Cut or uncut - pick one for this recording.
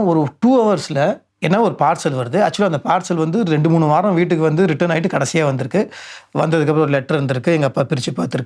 cut